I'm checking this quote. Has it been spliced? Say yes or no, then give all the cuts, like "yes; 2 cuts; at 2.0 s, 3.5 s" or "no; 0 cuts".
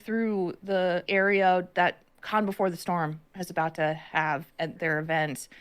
yes; 2 cuts; at 1.0 s, 4.8 s